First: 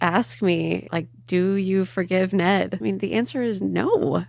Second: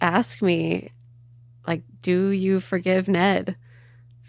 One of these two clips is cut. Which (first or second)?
first